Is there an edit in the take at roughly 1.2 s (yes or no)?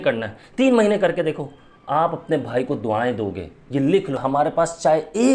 no